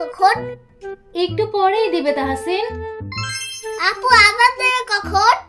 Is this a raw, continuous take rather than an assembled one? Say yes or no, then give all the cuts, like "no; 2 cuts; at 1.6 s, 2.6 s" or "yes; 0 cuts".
yes; 0 cuts